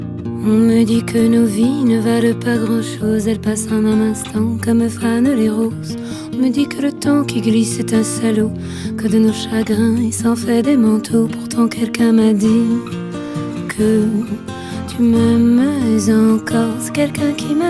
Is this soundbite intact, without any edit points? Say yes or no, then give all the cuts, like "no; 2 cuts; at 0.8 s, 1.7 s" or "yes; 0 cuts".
yes; 0 cuts